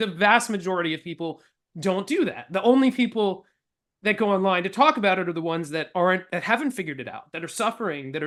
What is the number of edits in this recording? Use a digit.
0